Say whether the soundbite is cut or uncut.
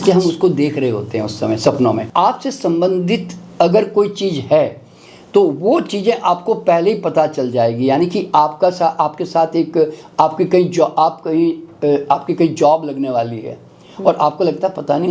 cut